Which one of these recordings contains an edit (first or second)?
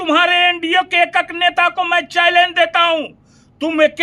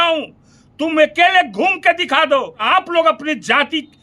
second